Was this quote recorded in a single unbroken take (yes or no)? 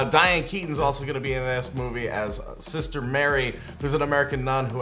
no